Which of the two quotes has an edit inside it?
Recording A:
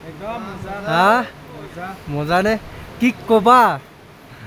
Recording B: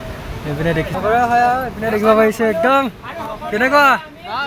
B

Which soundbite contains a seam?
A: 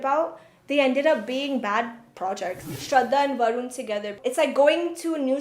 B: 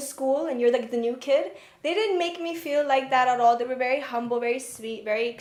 A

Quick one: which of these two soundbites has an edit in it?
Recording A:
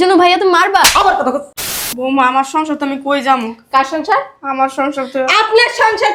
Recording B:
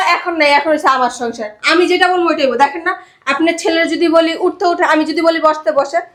A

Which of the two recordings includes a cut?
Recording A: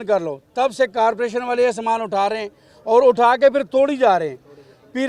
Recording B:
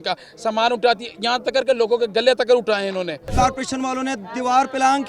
B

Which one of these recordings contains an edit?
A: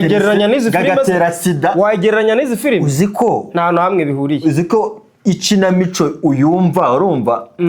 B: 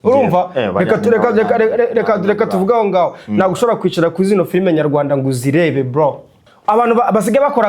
B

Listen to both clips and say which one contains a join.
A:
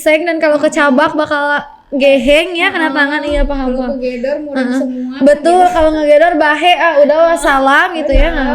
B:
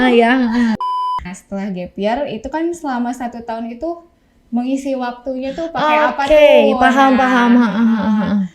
B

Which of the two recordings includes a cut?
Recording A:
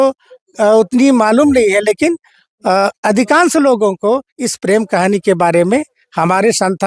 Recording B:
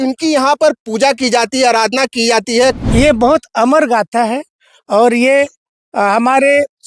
B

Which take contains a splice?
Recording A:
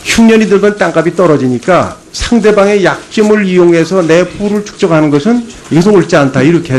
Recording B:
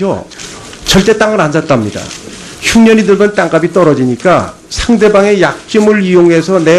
A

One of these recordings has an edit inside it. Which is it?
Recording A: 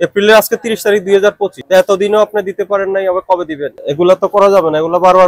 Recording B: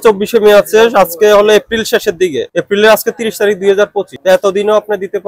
A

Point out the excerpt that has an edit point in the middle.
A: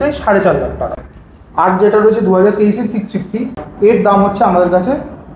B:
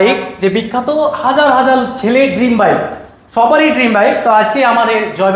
A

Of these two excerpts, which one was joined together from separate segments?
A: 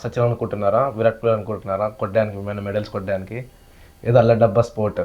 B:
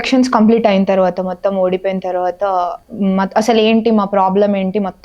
B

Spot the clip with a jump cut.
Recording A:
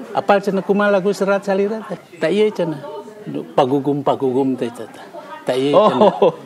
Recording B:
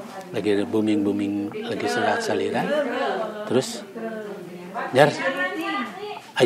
A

